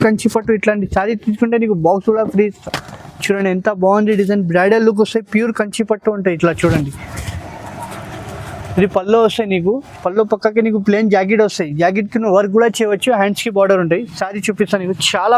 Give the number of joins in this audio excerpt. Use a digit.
0